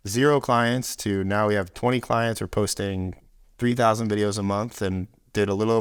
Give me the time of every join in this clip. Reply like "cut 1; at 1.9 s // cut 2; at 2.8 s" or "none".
none